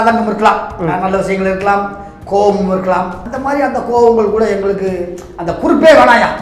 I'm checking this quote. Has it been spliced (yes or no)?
yes